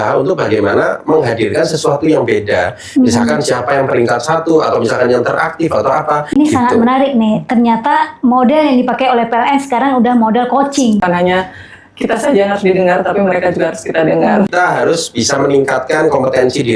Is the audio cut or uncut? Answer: cut